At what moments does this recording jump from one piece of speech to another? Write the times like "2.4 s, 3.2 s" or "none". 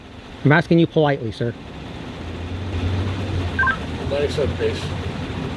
none